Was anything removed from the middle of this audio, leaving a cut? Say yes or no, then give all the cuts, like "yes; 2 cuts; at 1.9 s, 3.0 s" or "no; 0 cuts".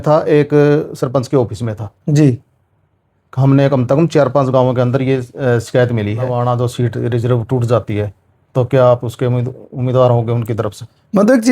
yes; 1 cut; at 6.3 s